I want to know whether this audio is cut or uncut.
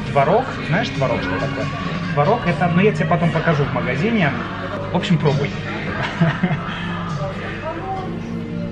uncut